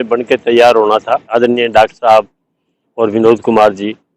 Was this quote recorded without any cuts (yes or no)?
no